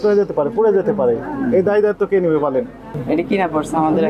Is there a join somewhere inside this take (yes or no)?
yes